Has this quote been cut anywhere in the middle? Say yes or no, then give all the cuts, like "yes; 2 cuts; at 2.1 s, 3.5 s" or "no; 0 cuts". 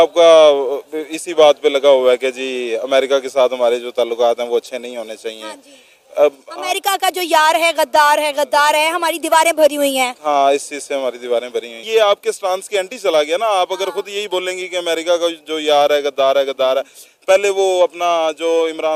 no; 0 cuts